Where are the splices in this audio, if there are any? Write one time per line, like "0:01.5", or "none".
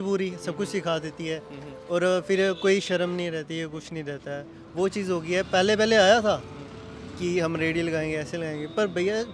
none